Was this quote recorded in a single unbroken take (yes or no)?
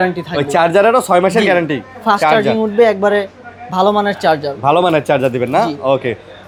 yes